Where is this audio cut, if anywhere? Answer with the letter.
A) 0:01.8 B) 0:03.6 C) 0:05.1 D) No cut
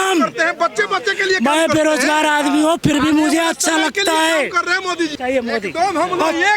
C